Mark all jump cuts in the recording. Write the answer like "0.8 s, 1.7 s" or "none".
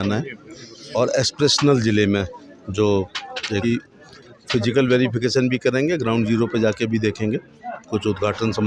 3.6 s